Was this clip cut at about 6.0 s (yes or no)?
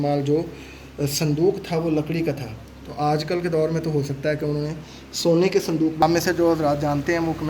yes